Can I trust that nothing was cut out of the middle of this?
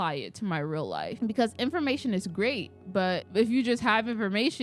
no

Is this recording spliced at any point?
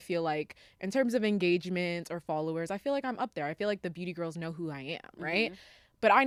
no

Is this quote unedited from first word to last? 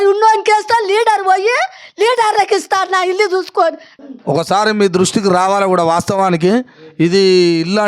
no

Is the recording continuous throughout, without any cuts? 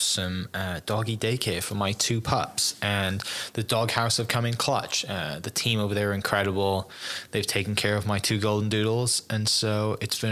yes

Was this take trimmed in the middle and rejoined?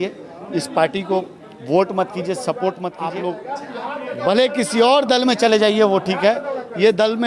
yes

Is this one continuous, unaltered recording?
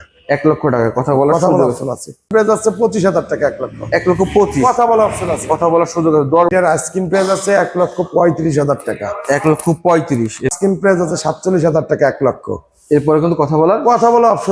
no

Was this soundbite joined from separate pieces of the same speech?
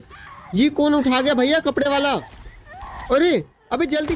no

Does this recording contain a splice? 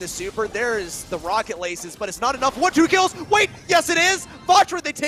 no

